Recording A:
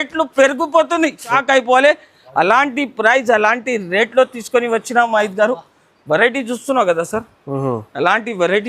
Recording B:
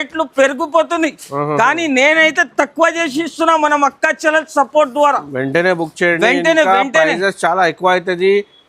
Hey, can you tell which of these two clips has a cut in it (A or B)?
A